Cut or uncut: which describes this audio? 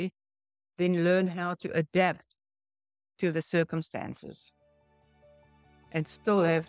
uncut